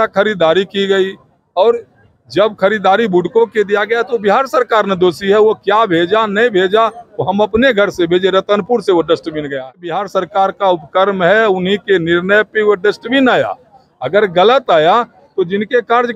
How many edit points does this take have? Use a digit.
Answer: 1